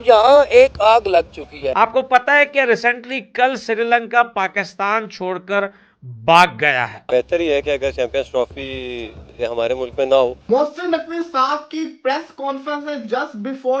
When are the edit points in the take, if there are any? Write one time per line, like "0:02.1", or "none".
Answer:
0:01.6
0:07.0
0:10.5